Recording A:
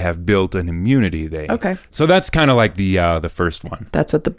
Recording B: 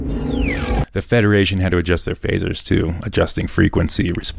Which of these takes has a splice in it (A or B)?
A